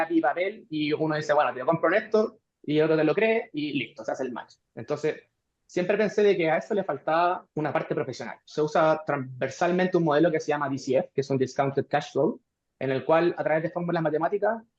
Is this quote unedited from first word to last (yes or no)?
no